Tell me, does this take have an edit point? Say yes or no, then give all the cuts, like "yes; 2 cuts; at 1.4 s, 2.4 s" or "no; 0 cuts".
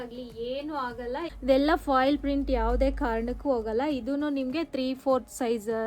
yes; 1 cut; at 1.3 s